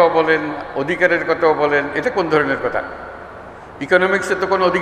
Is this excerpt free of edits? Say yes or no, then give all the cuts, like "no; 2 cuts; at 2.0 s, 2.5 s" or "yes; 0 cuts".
yes; 0 cuts